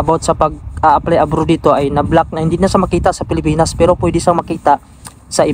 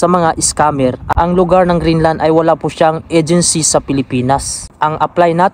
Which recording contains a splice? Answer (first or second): second